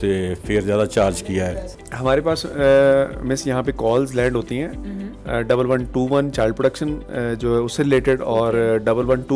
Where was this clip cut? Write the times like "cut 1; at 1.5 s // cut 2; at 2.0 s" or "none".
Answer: cut 1; at 1.7 s